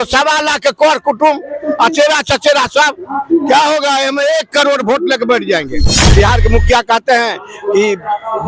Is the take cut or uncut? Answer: cut